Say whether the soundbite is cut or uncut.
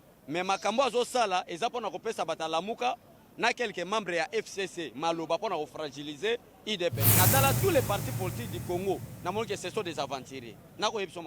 cut